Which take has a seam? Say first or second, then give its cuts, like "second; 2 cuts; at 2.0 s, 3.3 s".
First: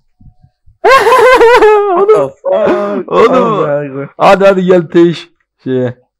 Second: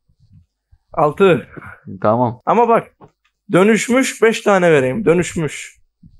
second; 1 cut; at 2.4 s